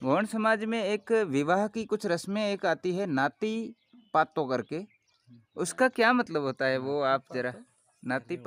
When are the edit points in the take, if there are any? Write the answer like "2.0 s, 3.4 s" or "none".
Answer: none